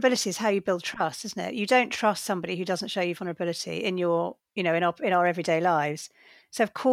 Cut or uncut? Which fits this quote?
cut